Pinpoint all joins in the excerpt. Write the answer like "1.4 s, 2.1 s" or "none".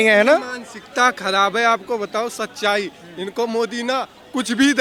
none